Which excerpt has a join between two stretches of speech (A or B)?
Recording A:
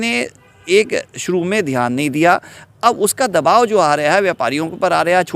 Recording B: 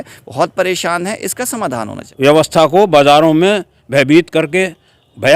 B